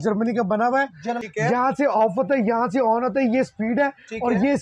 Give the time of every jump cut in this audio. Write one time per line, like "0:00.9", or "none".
0:01.2